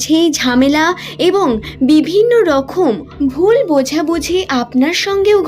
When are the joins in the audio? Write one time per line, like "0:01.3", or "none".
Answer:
0:03.1